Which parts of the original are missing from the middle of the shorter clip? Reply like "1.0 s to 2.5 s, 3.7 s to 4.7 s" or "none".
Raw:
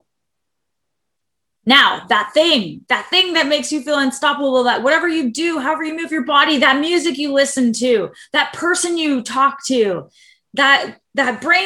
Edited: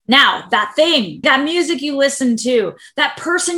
2.8 s to 6.6 s